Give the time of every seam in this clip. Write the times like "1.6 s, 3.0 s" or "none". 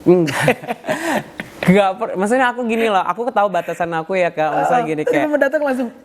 none